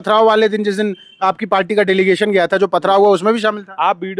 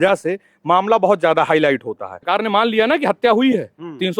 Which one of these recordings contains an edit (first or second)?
second